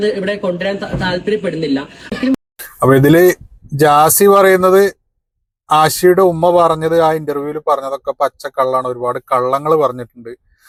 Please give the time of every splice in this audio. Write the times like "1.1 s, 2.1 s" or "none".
none